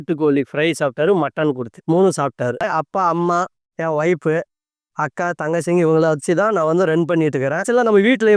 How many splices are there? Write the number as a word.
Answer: one